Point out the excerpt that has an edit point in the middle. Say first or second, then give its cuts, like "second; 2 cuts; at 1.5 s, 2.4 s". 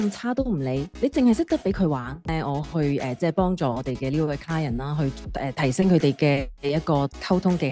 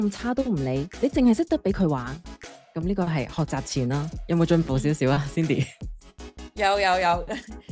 first; 1 cut; at 2.3 s